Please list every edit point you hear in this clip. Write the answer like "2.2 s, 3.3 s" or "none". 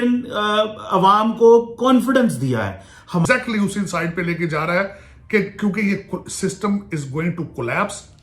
3.2 s